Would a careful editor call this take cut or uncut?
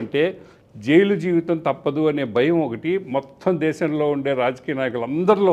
uncut